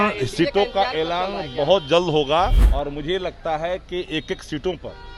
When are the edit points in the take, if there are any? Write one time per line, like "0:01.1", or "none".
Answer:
0:02.6